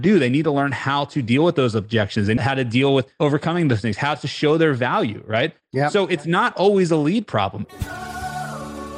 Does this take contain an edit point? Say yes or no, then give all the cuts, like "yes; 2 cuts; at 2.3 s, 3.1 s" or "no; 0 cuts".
yes; 2 cuts; at 3.1 s, 7.6 s